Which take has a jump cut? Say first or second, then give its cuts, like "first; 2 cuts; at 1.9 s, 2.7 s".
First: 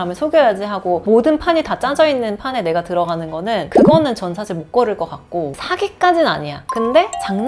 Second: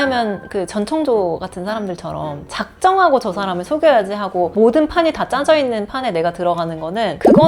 first; 1 cut; at 5.6 s